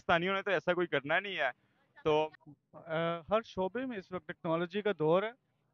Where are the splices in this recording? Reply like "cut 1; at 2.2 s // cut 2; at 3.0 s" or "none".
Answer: cut 1; at 2.3 s